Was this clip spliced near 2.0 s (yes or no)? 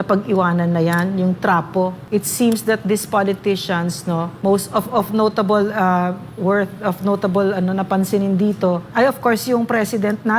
yes